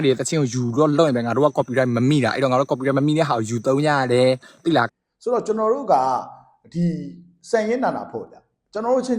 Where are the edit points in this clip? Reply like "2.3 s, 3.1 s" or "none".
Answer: 4.9 s